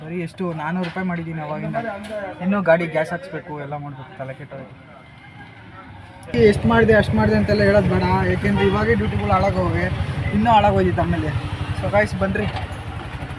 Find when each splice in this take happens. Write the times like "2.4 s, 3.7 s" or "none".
6.3 s